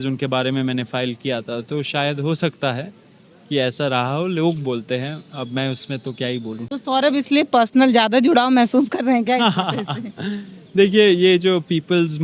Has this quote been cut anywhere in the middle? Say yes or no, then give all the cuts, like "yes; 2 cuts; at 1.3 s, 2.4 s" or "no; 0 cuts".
no; 0 cuts